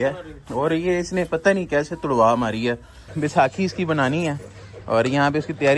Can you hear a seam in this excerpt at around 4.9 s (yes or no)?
no